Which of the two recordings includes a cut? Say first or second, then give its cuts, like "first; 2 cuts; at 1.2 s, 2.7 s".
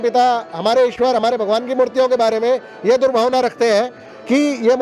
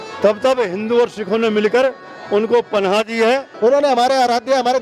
second; 1 cut; at 3.5 s